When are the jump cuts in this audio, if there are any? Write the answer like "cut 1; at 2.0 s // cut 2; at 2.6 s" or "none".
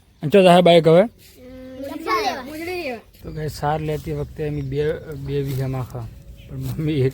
cut 1; at 3.1 s